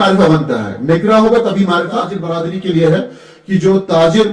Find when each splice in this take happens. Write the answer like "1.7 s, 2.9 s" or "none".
2.2 s

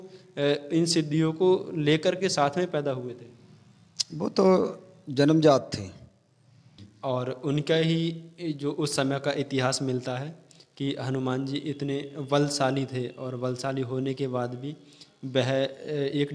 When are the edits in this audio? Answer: 6.9 s

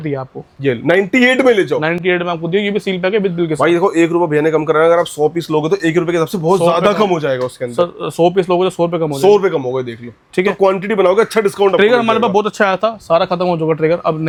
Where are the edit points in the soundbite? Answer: none

